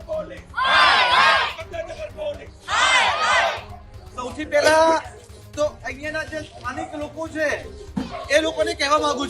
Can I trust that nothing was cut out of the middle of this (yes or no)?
yes